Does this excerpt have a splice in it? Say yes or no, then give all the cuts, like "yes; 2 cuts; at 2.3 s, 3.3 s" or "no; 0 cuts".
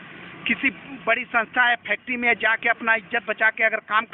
no; 0 cuts